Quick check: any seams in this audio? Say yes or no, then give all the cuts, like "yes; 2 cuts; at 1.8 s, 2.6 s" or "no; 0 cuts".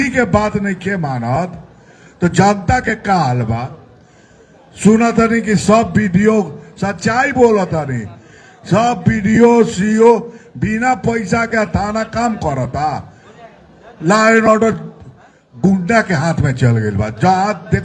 no; 0 cuts